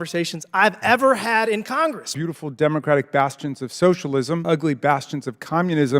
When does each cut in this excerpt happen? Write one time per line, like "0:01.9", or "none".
0:02.1
0:04.4